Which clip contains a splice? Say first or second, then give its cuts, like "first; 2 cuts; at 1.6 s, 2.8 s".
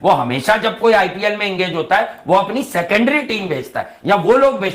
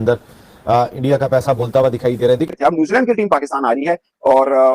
second; 1 cut; at 2.5 s